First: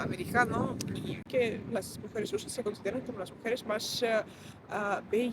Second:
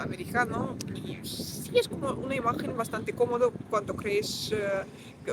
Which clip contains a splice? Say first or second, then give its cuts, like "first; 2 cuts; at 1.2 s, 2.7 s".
first; 1 cut; at 1.2 s